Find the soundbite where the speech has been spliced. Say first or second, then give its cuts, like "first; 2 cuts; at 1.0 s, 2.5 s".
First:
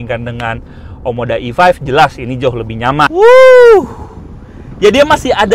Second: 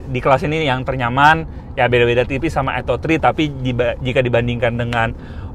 first; 1 cut; at 3.1 s